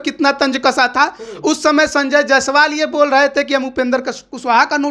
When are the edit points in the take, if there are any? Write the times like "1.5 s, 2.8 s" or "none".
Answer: none